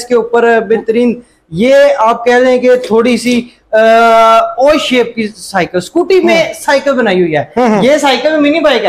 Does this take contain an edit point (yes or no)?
no